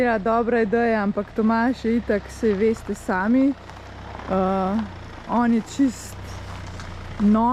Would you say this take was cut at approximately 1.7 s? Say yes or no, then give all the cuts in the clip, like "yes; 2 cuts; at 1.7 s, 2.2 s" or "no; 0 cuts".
no; 0 cuts